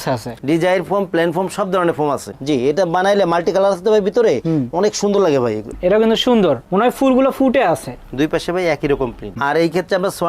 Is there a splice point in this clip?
yes; 3 cuts; at 2.3 s, 5.7 s, 9.4 s

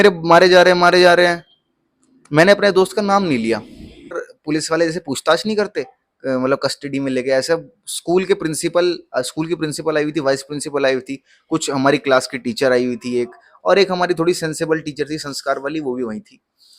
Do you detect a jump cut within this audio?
yes; 1 cut; at 4.3 s

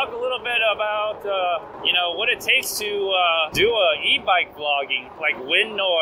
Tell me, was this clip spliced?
yes; 3 cuts; at 1.7 s, 3.5 s, 5.0 s

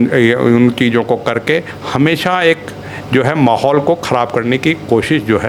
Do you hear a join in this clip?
no; 0 cuts

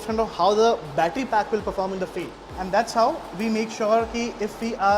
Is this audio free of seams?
no; 1 cut; at 2.4 s

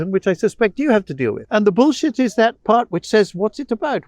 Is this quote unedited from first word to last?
no; 1 cut; at 1.4 s

